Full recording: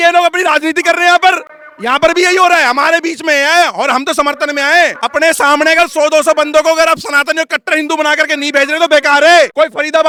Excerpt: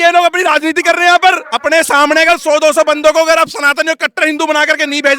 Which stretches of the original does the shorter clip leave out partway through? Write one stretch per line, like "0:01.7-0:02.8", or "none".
0:01.5-0:05.0